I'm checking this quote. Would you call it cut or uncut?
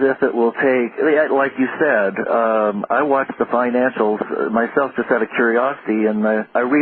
cut